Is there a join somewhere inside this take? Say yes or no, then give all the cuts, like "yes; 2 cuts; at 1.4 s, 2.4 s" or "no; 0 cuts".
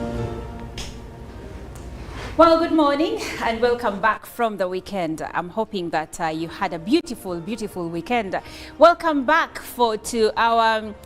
no; 0 cuts